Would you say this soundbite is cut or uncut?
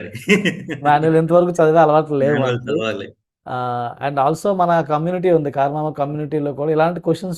uncut